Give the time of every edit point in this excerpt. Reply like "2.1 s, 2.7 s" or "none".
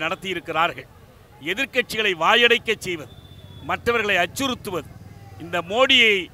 none